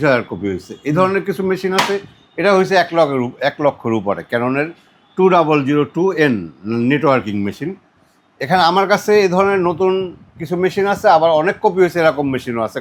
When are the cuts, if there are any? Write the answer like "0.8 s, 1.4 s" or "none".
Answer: none